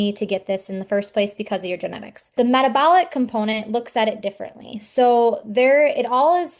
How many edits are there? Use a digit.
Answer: 0